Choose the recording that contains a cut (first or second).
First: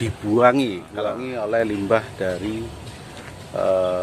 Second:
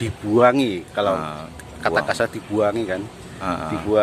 first